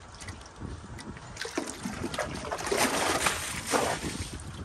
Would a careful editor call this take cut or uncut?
uncut